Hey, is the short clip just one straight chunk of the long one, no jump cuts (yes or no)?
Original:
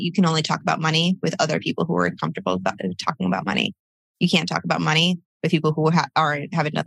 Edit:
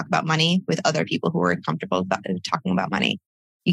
yes